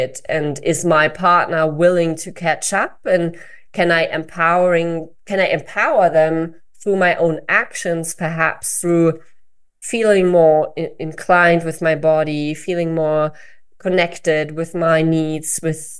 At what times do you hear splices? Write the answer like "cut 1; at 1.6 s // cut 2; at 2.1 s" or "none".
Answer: none